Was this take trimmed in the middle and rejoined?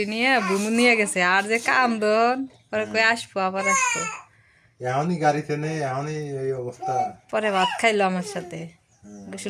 no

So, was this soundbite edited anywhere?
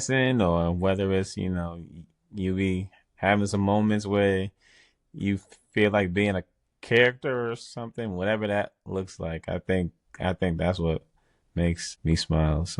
yes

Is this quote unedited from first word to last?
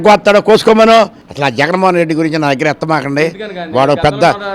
no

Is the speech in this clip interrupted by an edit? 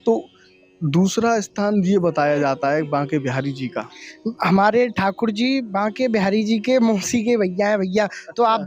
no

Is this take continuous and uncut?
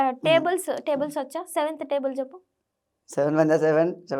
yes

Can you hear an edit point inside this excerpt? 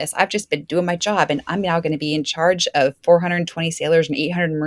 no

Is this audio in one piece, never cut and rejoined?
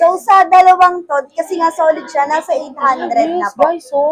yes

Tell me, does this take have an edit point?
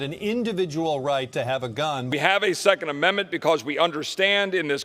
yes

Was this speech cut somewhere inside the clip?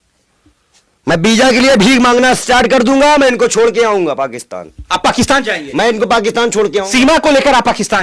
no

